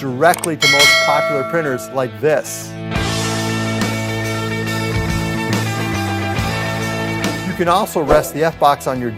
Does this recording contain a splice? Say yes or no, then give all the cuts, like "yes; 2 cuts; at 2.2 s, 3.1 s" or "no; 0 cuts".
yes; 1 cut; at 7.5 s